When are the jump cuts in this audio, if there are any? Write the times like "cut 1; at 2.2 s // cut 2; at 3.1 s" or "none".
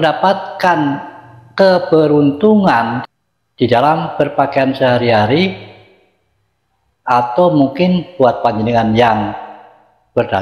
cut 1; at 3.0 s